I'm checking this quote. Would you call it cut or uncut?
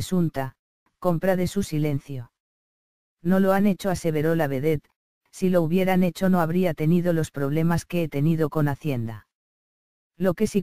uncut